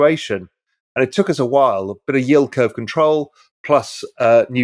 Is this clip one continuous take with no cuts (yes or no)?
yes